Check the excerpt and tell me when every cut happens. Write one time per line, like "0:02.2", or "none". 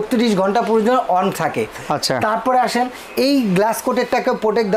none

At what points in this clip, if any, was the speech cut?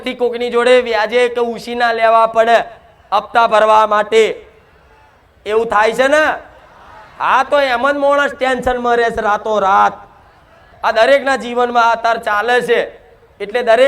0:10.7

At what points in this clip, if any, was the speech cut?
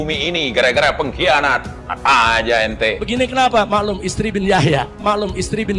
0:03.0

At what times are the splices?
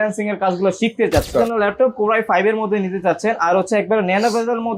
0:01.3

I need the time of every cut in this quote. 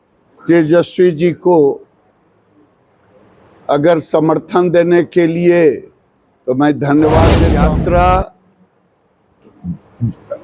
0:07.5

